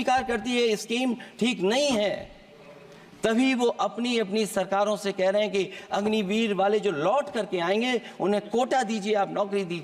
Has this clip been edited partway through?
no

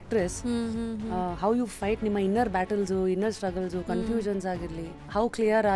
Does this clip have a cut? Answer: no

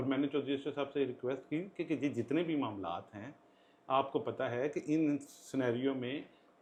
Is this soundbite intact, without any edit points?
yes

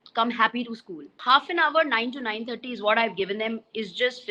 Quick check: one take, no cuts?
no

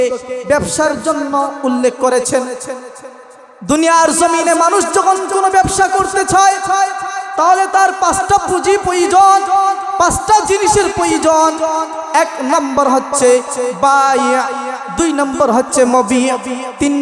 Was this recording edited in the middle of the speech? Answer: no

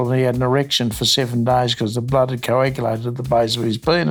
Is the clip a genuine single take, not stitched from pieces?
yes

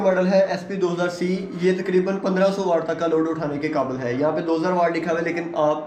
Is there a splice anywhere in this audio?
no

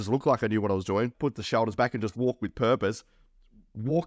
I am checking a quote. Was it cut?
yes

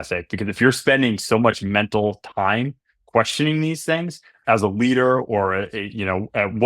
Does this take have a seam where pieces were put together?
yes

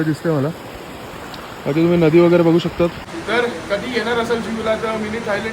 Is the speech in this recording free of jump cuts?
no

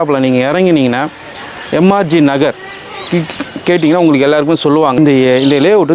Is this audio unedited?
no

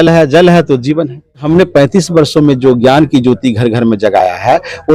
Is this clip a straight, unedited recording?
no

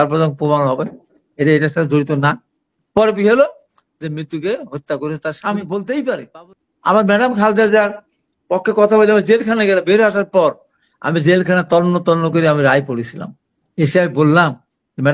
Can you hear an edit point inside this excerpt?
yes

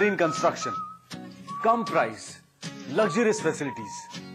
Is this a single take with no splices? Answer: yes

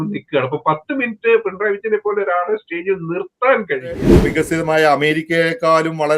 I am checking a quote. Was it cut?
yes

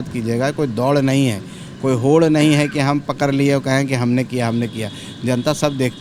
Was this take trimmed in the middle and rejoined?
no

